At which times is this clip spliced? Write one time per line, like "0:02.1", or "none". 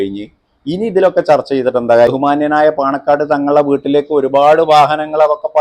0:02.1